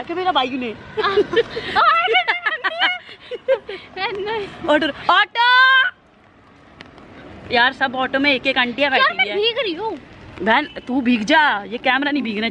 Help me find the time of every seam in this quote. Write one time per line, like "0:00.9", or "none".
none